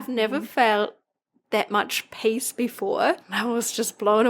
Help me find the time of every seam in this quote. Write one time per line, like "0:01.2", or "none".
0:03.3